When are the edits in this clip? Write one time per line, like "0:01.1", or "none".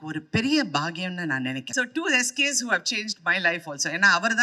0:01.7